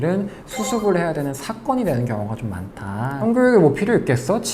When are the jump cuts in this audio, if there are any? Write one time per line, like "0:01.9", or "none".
0:03.2